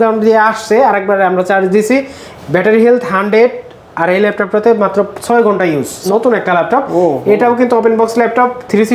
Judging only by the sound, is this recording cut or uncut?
cut